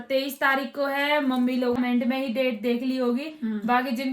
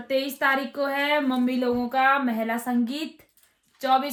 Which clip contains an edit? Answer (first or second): first